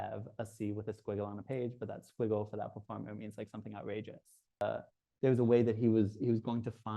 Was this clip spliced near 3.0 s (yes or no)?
no